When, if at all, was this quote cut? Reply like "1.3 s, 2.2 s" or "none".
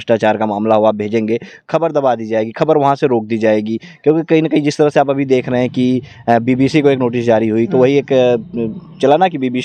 none